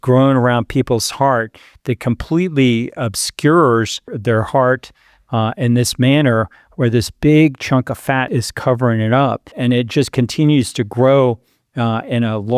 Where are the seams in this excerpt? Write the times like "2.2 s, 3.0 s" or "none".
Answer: 4.1 s, 8.3 s, 9.5 s